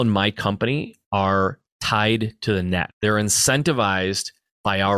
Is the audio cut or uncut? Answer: cut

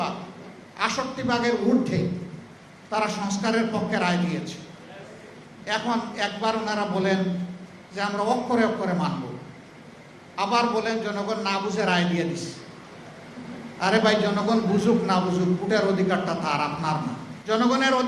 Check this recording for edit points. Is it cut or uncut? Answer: uncut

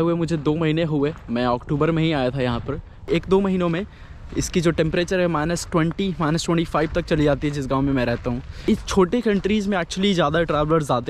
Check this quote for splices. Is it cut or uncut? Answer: cut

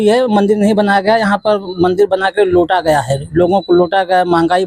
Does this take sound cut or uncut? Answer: uncut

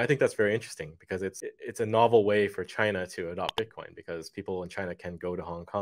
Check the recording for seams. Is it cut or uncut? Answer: cut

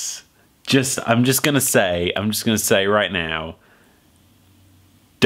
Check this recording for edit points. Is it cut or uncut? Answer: uncut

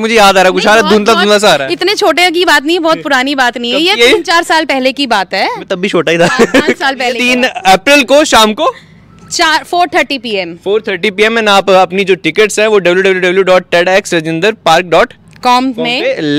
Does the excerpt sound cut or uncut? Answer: cut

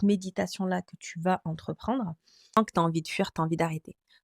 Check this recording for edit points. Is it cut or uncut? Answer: cut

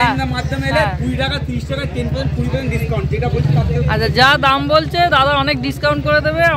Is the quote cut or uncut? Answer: uncut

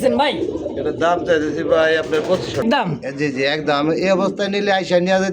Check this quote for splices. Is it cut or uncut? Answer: cut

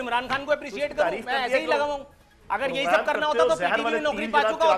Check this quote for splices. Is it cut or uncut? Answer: uncut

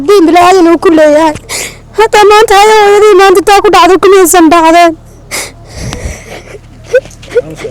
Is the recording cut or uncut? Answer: uncut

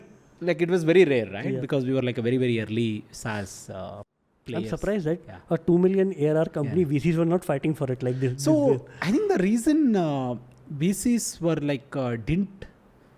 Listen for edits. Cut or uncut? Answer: uncut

